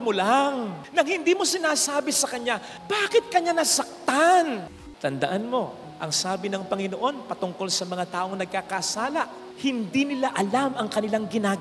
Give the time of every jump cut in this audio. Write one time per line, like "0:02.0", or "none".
0:04.8